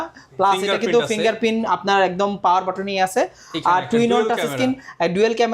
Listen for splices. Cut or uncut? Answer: uncut